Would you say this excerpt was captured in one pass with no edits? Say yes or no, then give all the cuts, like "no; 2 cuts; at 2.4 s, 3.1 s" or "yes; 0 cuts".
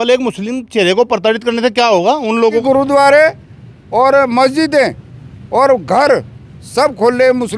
no; 1 cut; at 2.6 s